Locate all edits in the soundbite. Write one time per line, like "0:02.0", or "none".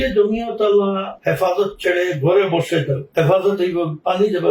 0:01.1
0:03.0